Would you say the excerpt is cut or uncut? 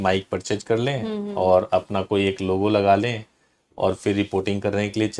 uncut